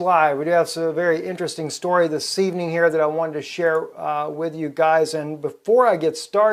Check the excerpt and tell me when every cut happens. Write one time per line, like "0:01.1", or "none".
0:04.0